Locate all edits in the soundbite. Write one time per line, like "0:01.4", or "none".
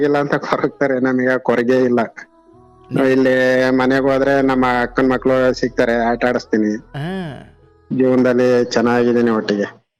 none